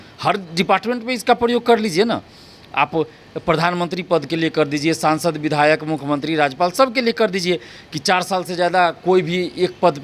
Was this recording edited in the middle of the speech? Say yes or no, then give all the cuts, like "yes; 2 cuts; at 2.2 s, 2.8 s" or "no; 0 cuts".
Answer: no; 0 cuts